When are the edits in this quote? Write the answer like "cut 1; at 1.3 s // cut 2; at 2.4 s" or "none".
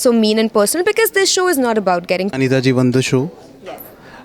cut 1; at 2.3 s